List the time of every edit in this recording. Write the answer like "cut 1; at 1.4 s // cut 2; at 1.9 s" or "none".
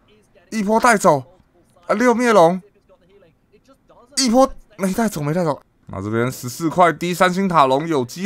cut 1; at 5.7 s